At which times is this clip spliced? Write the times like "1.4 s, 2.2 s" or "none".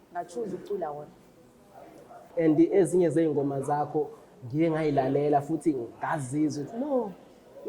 2.2 s